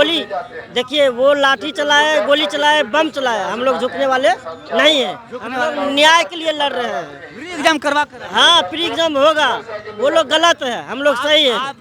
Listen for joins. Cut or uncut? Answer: uncut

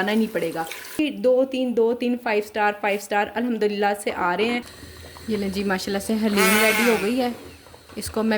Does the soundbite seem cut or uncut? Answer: cut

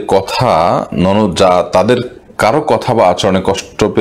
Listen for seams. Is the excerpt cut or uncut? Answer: cut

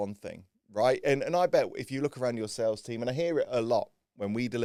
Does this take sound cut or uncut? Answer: uncut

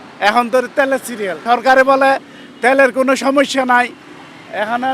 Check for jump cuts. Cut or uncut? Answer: cut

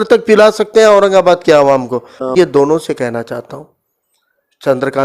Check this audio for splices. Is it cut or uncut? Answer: cut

